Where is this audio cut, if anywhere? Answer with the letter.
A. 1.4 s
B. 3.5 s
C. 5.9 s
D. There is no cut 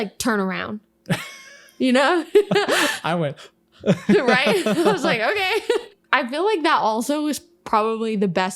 C